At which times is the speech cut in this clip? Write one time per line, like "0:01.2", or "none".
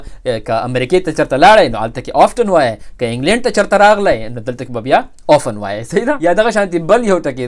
0:06.2